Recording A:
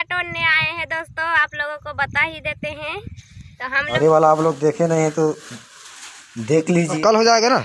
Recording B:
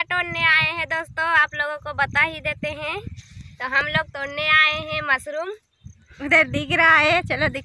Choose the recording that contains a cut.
A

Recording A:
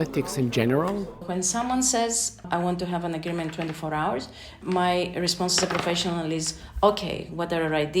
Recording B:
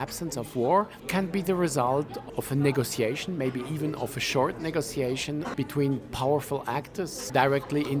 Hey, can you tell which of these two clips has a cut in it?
A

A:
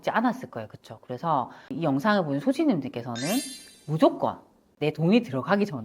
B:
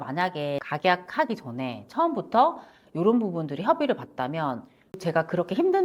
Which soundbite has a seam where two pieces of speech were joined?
A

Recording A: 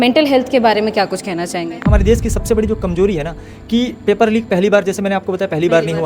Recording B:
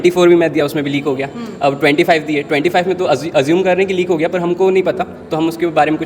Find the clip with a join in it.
A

